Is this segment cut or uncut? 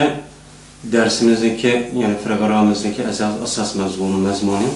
uncut